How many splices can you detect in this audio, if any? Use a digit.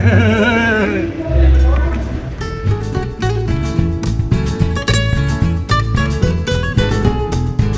0